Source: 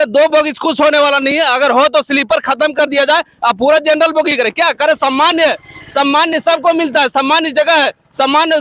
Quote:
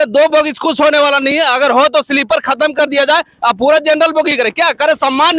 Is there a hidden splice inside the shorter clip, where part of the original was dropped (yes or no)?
no